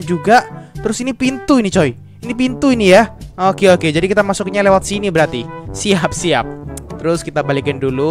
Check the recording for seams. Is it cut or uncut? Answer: uncut